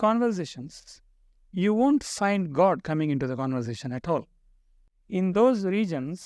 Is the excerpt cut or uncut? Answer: cut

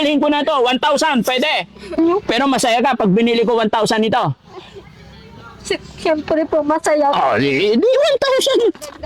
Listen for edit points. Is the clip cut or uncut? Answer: cut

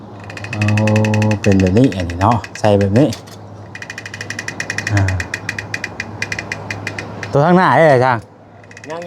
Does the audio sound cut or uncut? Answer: uncut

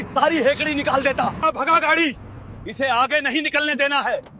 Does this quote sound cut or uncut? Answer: cut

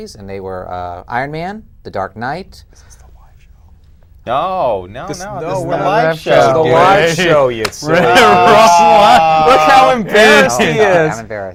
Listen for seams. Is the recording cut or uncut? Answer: uncut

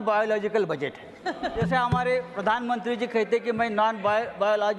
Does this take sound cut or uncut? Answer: cut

